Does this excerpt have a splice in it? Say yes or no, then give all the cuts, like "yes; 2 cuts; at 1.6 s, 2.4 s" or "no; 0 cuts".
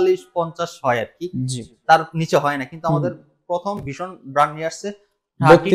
no; 0 cuts